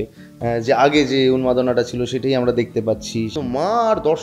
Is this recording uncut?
no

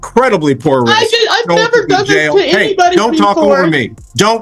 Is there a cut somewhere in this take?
no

